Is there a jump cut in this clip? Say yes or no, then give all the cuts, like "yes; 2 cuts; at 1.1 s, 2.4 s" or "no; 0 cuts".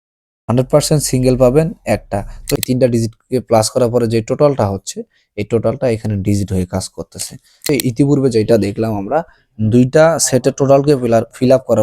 yes; 2 cuts; at 2.5 s, 7.7 s